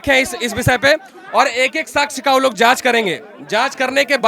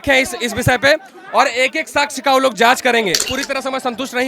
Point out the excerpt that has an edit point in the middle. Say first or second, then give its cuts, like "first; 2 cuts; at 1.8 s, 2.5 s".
second; 1 cut; at 3.3 s